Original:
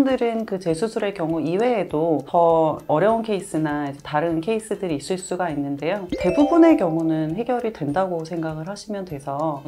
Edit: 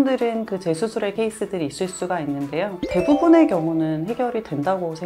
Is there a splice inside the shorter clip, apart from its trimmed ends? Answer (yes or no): yes